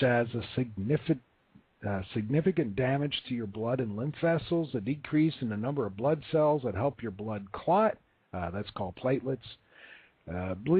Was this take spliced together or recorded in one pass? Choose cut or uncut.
uncut